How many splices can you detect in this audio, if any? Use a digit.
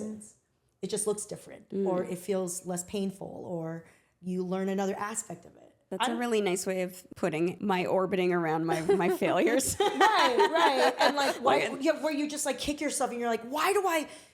2